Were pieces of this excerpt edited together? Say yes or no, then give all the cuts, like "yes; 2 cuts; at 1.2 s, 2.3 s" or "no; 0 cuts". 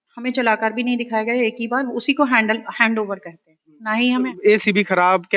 yes; 1 cut; at 4.3 s